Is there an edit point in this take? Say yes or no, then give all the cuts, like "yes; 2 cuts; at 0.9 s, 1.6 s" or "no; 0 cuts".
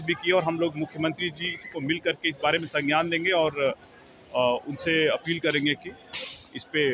no; 0 cuts